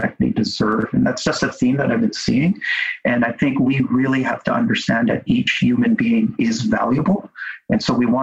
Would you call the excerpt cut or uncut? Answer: uncut